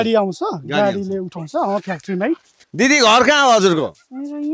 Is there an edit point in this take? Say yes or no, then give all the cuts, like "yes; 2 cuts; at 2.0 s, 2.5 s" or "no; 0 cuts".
yes; 1 cut; at 2.6 s